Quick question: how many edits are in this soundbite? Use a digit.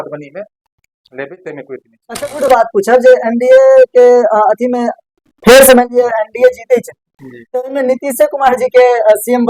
1